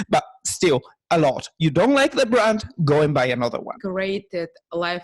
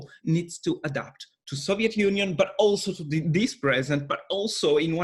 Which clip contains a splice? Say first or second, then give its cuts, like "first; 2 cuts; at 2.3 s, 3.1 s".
first; 1 cut; at 3.7 s